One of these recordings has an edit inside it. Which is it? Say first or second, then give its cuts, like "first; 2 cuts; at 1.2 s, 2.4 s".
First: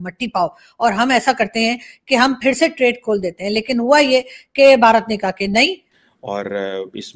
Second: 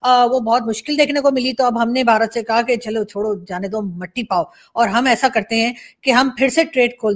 first; 1 cut; at 5.9 s